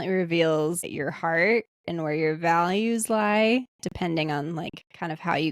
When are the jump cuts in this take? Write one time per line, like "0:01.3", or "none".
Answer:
0:00.9